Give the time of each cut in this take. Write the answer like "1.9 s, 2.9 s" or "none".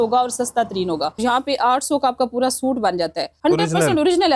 1.1 s, 3.3 s